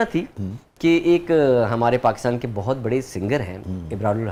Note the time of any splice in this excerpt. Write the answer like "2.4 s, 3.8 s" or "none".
none